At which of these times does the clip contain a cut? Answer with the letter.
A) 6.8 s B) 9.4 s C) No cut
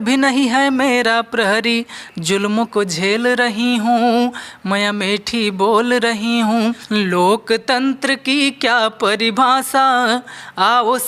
A